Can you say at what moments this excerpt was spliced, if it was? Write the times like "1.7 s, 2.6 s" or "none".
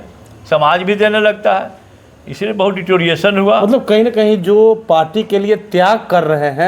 none